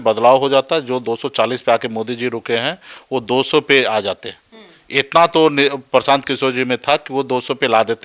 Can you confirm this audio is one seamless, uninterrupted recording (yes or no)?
yes